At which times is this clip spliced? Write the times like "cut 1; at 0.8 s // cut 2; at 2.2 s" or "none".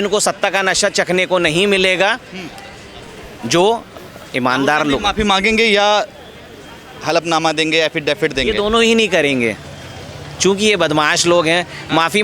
none

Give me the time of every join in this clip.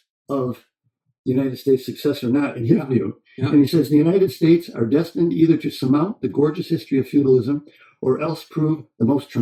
none

